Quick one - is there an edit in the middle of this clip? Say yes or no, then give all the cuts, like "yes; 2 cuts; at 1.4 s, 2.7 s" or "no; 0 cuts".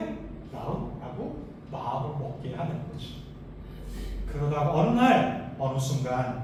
no; 0 cuts